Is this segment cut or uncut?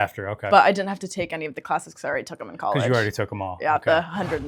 uncut